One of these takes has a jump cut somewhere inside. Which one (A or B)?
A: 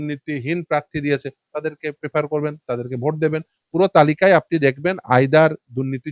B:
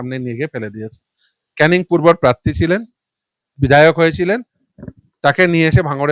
A